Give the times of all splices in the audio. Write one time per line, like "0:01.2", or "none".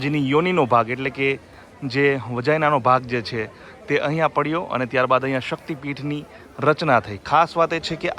none